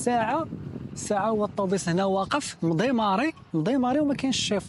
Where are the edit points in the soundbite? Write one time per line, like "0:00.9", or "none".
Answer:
none